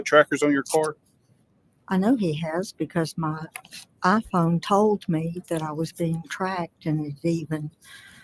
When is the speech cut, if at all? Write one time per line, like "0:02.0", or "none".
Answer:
none